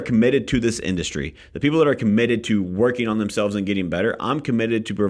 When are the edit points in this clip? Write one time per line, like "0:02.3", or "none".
none

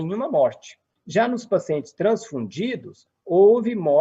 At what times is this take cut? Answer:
none

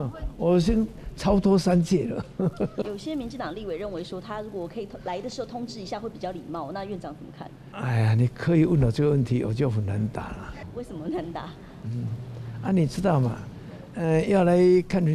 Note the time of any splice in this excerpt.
0:02.8
0:07.6
0:10.6

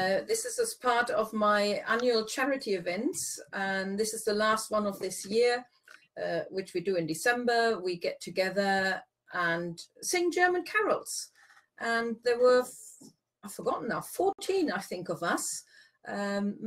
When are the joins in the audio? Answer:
none

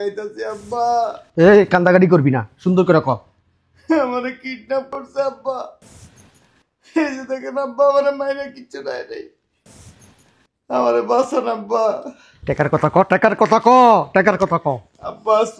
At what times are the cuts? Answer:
none

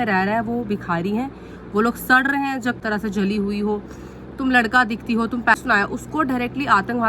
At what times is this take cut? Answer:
0:02.8
0:05.6

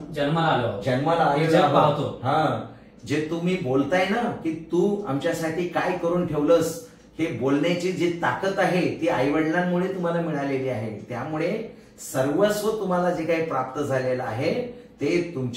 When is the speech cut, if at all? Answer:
none

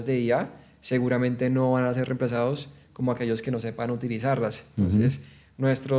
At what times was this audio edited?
none

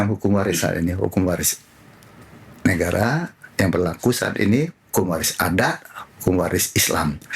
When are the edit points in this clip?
none

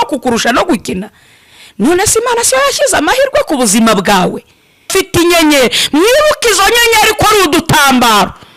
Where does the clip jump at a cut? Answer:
0:04.9

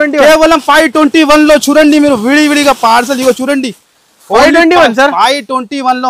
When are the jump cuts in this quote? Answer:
none

